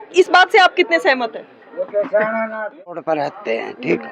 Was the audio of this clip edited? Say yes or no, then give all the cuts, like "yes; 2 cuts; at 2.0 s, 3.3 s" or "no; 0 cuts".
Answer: yes; 1 cut; at 3.1 s